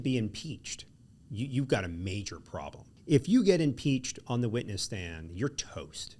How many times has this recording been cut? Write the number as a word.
one